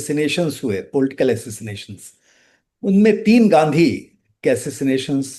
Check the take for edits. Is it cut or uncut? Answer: uncut